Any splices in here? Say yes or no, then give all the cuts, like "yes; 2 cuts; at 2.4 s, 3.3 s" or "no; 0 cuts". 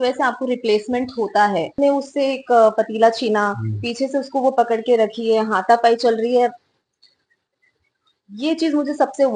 yes; 1 cut; at 1.7 s